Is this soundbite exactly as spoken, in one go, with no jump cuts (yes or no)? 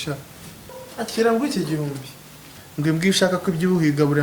no